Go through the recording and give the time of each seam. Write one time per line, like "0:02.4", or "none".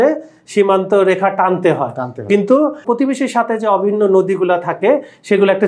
0:02.8